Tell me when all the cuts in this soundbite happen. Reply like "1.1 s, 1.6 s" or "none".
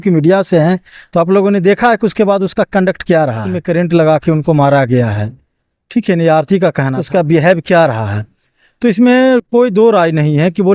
3.6 s, 7.0 s